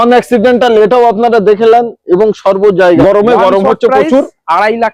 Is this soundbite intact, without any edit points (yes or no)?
no